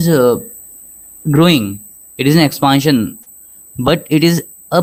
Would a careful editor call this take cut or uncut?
uncut